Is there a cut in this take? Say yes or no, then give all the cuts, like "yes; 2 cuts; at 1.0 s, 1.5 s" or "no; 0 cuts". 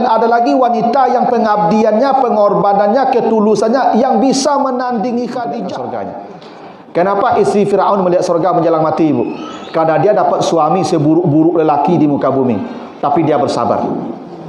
yes; 1 cut; at 5.8 s